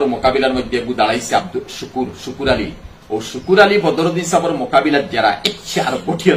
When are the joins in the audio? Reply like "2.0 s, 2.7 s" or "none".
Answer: none